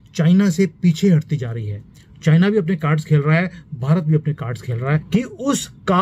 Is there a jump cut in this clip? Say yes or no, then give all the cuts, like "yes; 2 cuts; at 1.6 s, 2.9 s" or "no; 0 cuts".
yes; 1 cut; at 5.0 s